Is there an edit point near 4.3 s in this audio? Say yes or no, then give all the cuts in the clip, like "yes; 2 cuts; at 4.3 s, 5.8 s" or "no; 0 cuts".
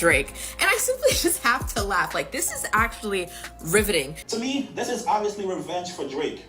yes; 1 cut; at 4.3 s